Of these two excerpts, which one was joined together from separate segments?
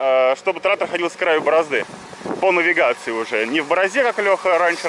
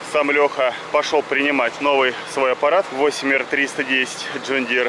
second; 3 cuts; at 0.8 s, 1.8 s, 2.9 s

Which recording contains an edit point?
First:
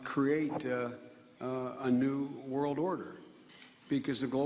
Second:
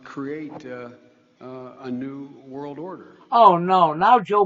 first; 1 cut; at 3.2 s

